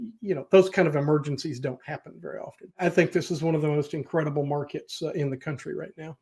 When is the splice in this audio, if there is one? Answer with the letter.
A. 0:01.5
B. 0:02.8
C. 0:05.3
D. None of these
B